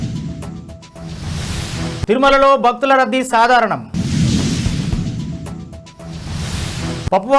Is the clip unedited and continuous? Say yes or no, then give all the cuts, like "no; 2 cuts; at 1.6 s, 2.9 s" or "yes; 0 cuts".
no; 1 cut; at 2.1 s